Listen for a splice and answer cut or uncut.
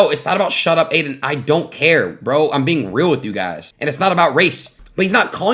uncut